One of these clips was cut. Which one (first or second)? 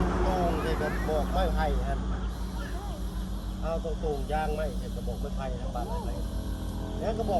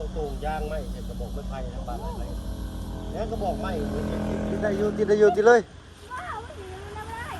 second